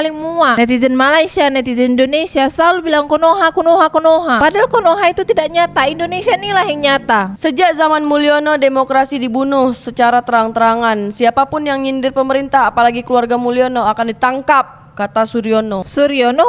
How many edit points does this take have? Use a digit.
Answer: 0